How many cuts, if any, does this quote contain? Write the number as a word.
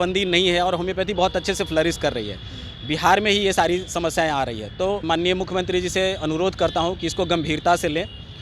one